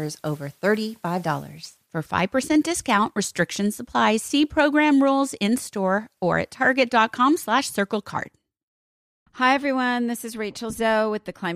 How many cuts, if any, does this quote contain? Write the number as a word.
one